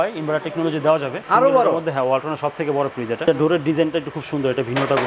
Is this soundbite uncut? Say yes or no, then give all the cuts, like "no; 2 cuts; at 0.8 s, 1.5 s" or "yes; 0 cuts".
no; 2 cuts; at 1.2 s, 3.2 s